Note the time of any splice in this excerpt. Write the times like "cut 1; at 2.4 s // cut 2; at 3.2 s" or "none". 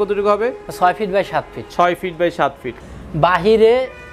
cut 1; at 2.8 s